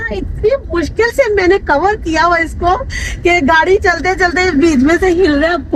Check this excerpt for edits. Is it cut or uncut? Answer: uncut